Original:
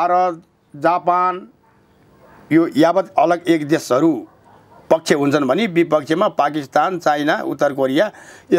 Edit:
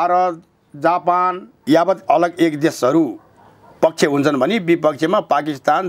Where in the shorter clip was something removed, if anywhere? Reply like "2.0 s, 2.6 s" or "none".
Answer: 1.6 s